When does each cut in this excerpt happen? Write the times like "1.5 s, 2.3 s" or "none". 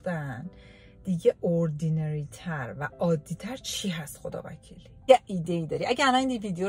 5.1 s